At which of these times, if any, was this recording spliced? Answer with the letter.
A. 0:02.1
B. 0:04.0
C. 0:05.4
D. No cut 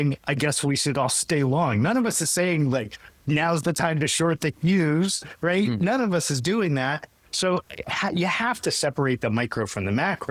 D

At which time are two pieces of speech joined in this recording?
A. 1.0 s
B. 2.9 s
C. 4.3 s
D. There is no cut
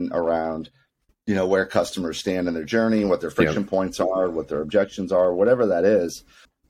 D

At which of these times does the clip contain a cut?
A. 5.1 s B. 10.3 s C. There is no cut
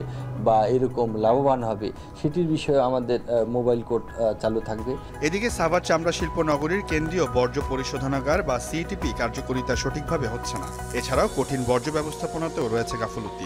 C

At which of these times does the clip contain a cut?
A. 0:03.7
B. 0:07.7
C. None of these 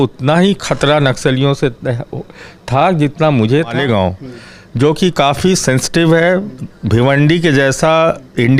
A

